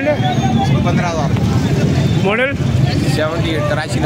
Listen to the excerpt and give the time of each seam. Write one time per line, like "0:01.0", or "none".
none